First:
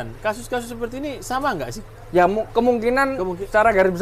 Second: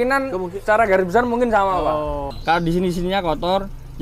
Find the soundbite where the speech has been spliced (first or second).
second